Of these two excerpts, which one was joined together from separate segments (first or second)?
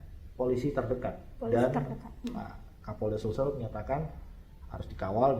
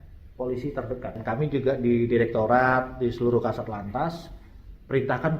second